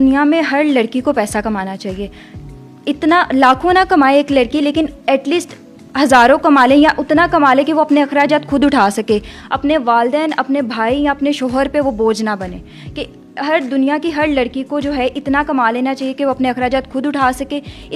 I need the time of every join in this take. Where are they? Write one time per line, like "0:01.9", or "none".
none